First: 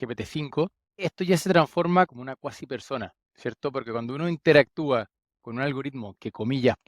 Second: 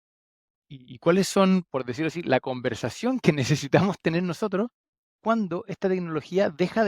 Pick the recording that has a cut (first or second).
first